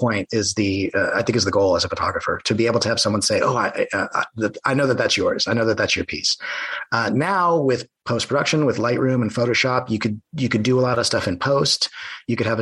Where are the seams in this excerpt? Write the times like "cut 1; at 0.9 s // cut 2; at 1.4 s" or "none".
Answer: none